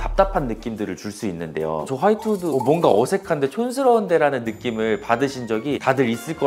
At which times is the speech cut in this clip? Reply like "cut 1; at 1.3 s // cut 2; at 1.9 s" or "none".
cut 1; at 1.9 s